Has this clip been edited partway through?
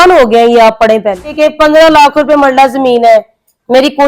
yes; 1 cut; at 1.3 s

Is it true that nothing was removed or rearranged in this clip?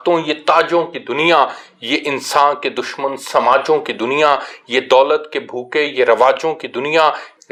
yes; 0 cuts

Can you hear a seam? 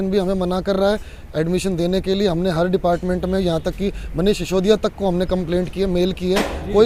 no; 0 cuts

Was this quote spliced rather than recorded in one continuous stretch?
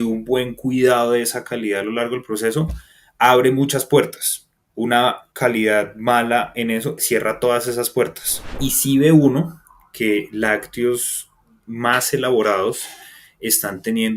yes; 1 cut; at 8.6 s

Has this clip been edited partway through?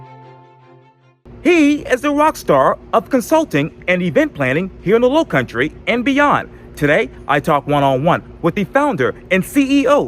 yes; 1 cut; at 1.3 s

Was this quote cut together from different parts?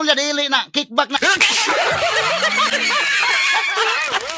no; 0 cuts

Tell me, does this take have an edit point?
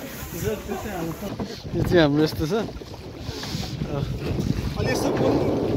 yes; 1 cut; at 1.2 s

